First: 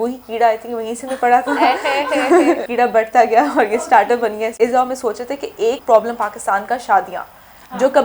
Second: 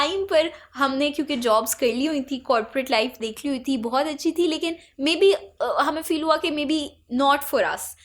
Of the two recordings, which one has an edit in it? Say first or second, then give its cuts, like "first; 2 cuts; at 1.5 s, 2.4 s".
first; 3 cuts; at 2.7 s, 4.5 s, 5.8 s